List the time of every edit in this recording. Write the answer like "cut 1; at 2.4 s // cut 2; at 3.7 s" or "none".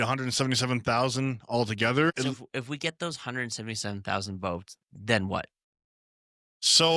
cut 1; at 2.1 s